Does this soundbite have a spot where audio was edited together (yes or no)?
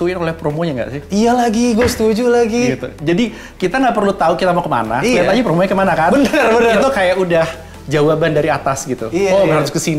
no